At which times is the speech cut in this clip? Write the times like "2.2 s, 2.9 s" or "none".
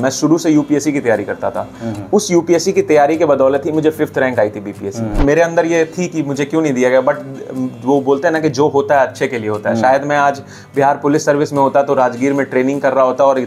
5.2 s